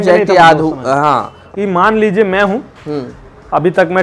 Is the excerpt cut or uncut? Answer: cut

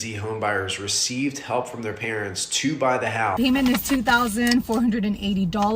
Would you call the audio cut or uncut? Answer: cut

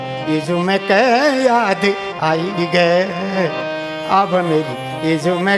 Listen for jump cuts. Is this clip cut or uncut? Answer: uncut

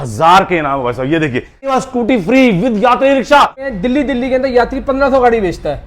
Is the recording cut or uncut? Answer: cut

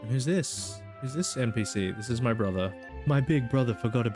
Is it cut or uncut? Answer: cut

